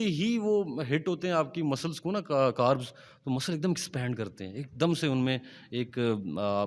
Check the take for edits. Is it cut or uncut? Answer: uncut